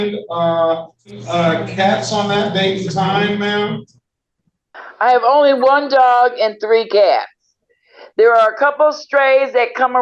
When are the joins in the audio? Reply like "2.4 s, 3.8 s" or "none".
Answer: 1.2 s